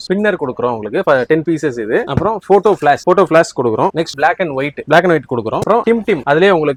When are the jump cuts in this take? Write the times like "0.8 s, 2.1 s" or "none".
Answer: none